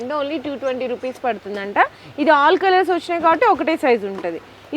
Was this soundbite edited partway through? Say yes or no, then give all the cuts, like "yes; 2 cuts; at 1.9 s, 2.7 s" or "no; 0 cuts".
no; 0 cuts